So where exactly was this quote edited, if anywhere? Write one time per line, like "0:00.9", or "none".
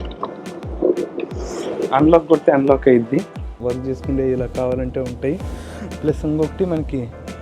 0:03.5